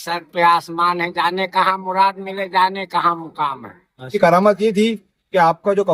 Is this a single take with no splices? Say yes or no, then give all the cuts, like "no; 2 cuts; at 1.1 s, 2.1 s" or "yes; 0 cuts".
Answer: no; 1 cut; at 4.2 s